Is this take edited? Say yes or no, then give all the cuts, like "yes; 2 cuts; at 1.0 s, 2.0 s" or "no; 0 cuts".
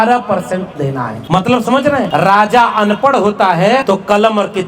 yes; 3 cuts; at 1.1 s, 2.1 s, 3.8 s